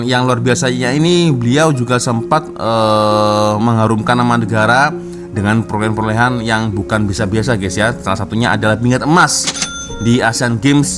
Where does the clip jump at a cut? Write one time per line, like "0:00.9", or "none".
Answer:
none